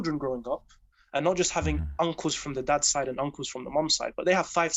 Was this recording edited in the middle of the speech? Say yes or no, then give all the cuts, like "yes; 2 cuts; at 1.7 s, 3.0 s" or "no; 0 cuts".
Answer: no; 0 cuts